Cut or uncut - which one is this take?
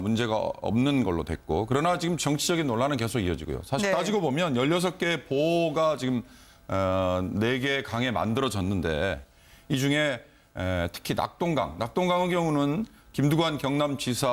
cut